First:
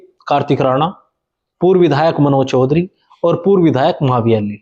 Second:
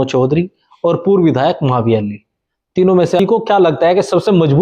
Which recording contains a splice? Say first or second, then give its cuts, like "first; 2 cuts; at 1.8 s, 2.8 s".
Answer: second; 1 cut; at 3.2 s